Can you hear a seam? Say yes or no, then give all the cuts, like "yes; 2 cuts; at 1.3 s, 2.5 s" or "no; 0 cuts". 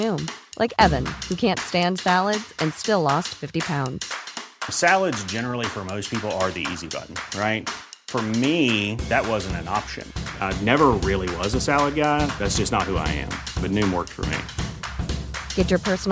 no; 0 cuts